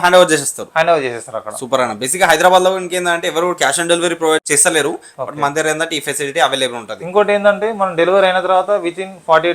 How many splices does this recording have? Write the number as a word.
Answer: one